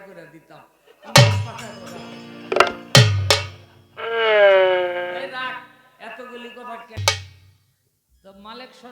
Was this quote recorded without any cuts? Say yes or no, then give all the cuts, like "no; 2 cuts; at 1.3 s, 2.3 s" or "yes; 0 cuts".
no; 1 cut; at 7.0 s